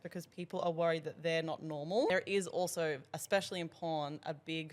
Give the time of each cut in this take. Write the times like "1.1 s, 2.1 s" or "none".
2.1 s